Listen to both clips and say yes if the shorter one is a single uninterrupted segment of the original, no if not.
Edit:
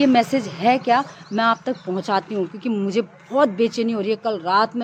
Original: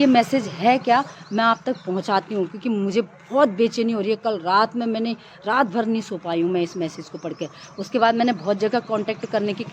yes